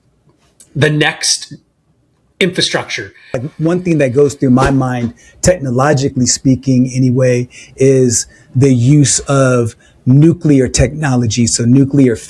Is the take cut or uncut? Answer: cut